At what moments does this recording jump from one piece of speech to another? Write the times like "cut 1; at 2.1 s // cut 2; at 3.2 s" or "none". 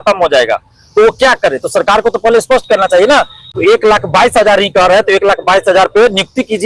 cut 1; at 3.5 s

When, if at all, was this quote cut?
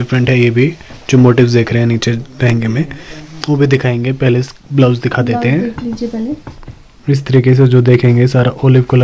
none

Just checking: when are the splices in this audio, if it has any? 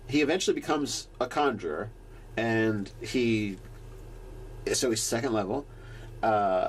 cut 1; at 4.5 s

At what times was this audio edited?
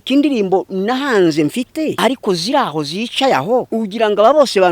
cut 1; at 1.9 s // cut 2; at 3.7 s

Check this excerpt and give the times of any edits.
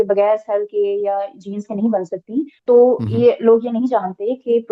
cut 1; at 2.6 s

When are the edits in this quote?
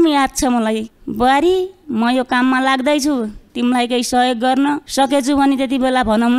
cut 1; at 0.9 s // cut 2; at 4.9 s

